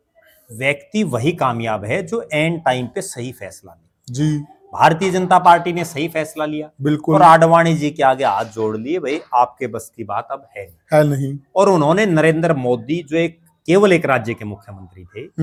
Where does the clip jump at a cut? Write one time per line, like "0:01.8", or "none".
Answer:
none